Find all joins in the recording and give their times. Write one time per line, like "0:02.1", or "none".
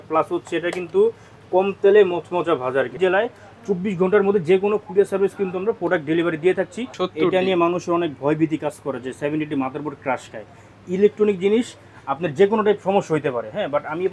0:02.9
0:06.8